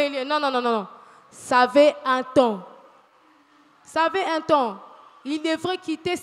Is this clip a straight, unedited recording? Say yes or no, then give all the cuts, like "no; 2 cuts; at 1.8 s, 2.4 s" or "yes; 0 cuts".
yes; 0 cuts